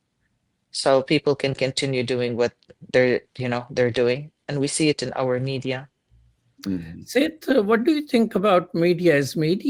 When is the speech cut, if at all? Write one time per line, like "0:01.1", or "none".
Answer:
none